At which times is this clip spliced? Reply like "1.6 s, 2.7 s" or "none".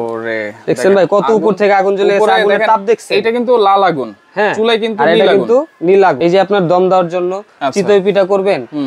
6.2 s